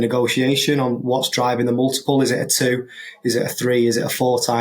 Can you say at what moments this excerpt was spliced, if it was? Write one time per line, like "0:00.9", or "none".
none